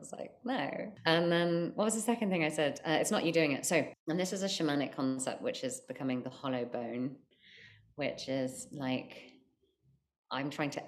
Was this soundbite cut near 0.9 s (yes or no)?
yes